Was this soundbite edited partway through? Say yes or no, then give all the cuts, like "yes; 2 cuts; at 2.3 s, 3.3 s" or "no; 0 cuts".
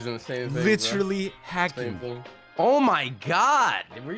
yes; 1 cut; at 2.3 s